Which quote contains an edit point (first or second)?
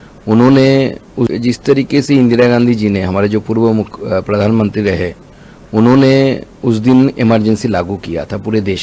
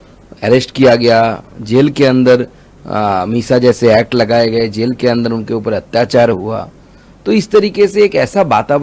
first